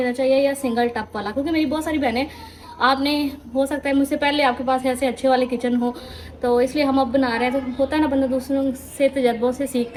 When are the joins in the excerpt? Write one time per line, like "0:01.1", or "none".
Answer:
none